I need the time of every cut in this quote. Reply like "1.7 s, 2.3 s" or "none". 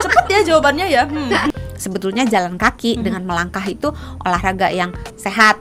1.5 s